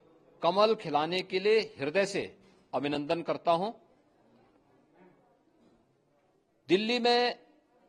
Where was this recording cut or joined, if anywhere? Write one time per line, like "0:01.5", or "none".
none